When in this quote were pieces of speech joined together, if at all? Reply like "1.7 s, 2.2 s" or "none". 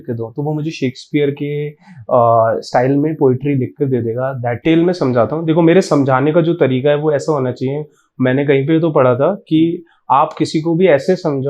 4.6 s